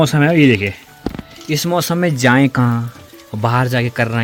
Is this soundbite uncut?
yes; 0 cuts

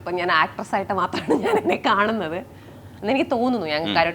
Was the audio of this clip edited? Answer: no; 0 cuts

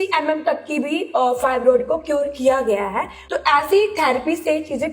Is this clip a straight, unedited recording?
no; 1 cut; at 3.2 s

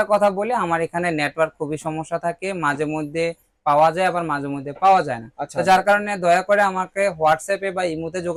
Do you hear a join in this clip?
no; 0 cuts

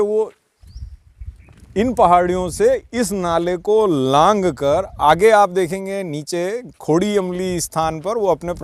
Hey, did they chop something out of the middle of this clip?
no; 0 cuts

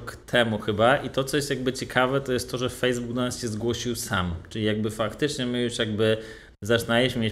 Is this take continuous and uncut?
yes; 0 cuts

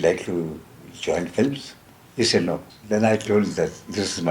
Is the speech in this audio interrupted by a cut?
yes; 1 cut; at 2.7 s

